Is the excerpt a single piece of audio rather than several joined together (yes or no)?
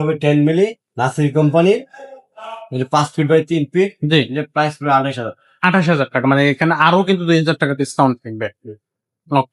yes